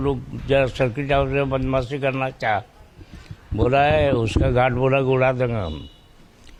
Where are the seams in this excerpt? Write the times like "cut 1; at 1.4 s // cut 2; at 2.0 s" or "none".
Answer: none